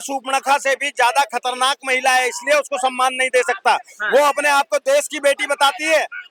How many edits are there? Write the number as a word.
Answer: zero